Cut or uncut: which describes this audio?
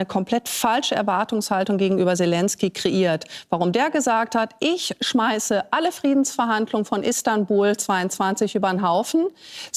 uncut